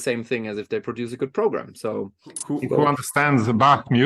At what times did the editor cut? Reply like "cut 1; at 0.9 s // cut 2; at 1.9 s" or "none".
cut 1; at 2.3 s